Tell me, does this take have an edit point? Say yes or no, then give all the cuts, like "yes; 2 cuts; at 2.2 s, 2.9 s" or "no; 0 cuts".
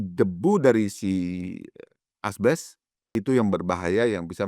yes; 1 cut; at 3.1 s